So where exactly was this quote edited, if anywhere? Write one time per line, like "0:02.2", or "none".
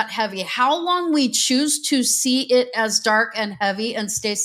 none